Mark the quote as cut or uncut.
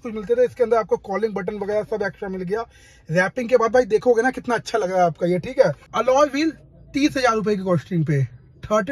cut